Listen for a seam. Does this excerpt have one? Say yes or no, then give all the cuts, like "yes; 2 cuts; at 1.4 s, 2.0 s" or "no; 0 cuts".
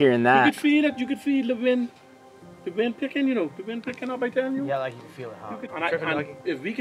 yes; 1 cut; at 5.6 s